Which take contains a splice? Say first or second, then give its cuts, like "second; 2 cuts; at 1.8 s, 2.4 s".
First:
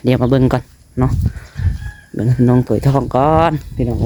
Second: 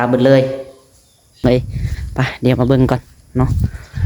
second; 1 cut; at 1.4 s